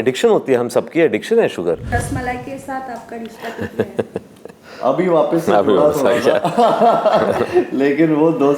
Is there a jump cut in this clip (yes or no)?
yes